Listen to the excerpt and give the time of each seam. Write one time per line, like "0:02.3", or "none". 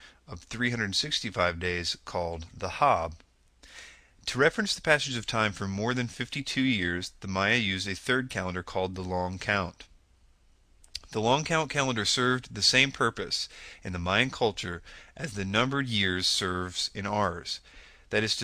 0:11.7